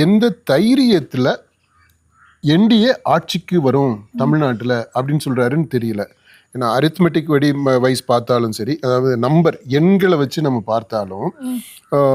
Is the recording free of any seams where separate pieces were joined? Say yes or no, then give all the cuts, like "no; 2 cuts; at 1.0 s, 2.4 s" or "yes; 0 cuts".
yes; 0 cuts